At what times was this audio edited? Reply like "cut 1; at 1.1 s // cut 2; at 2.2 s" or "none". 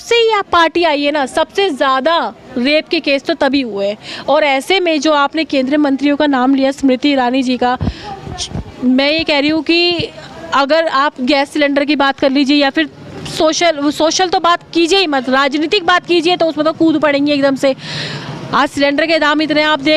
none